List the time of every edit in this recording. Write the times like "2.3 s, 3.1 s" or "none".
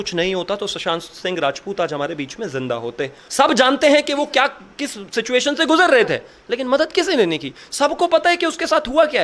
3.2 s